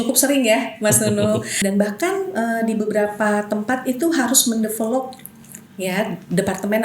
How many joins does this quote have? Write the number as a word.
one